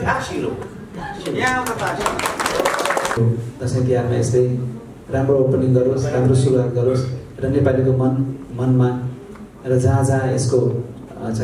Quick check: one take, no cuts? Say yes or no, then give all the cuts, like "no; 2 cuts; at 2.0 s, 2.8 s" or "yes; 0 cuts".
no; 1 cut; at 3.2 s